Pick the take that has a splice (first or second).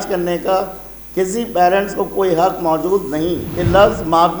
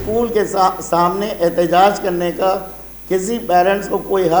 first